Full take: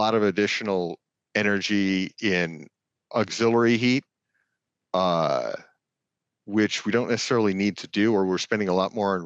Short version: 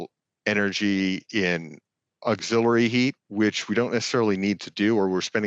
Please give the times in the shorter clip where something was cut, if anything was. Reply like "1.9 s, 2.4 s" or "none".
3.2 s